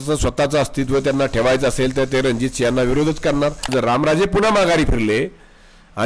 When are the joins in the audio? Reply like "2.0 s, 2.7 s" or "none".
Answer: 3.6 s